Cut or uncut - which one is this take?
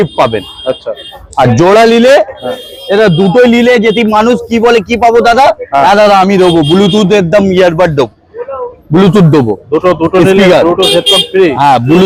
uncut